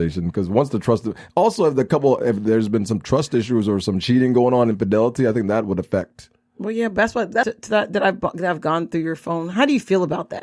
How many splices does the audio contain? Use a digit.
1